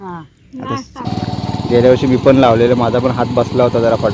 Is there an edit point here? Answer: yes; 1 cut; at 1.1 s

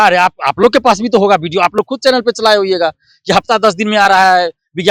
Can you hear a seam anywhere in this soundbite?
no; 0 cuts

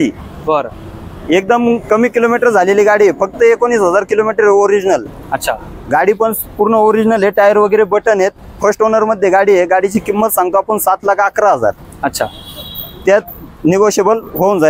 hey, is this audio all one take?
yes; 0 cuts

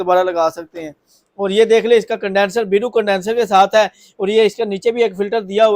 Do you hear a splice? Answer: no; 0 cuts

